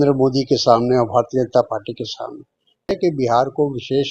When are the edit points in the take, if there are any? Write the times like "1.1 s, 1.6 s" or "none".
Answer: 2.9 s